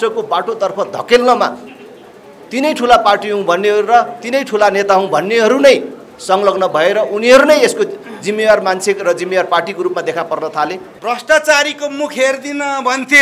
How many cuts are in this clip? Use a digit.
1